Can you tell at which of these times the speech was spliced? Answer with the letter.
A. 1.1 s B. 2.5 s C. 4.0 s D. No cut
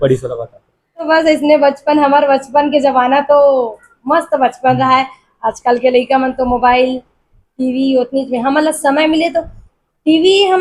A